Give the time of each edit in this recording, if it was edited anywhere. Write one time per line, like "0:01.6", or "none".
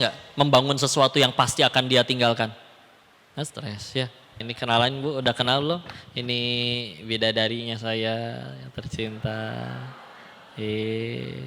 0:04.5

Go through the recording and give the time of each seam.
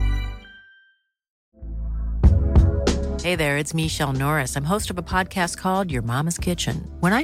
0:01.3

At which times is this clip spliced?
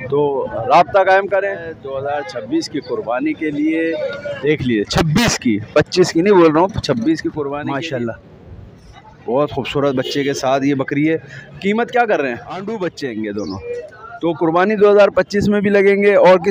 0:01.8
0:07.6
0:12.6

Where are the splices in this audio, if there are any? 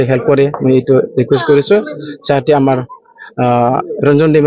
none

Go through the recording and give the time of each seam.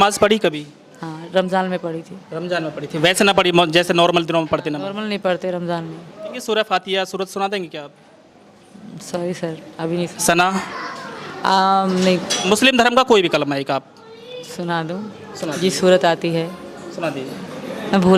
0:06.4
0:12.3

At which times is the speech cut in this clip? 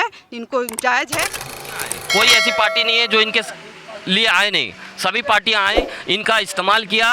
0:01.7

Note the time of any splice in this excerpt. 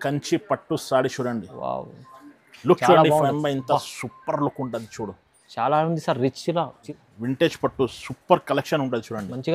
0:06.8

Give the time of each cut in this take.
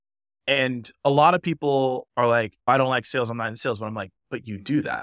0:02.7

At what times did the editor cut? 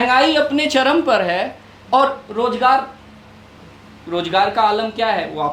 none

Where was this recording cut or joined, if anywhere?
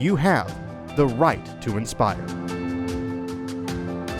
0:02.2

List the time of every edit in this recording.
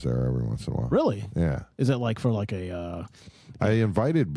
none

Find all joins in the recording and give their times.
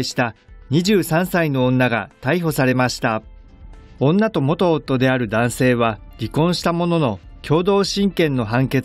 0:06.6

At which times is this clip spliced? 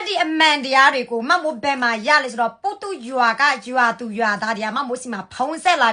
none

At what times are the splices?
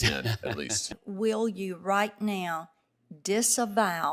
0:00.9

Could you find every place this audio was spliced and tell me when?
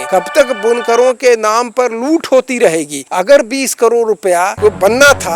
none

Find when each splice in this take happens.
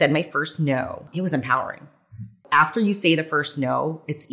0:01.1
0:02.4

